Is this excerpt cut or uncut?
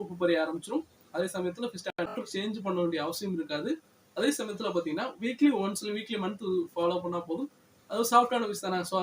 cut